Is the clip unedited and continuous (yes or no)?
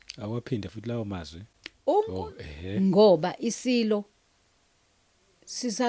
no